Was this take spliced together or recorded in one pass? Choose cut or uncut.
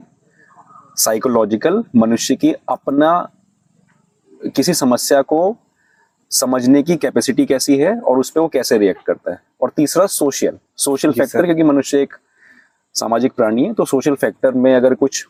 uncut